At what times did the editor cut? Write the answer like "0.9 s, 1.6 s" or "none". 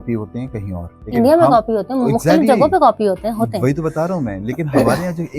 0.9 s